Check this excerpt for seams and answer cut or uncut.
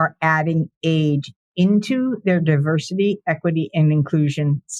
uncut